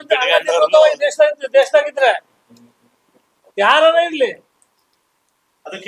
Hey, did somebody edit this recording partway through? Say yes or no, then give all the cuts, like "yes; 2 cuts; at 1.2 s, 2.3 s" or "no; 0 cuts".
no; 0 cuts